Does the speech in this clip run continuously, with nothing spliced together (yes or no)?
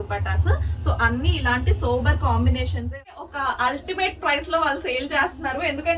no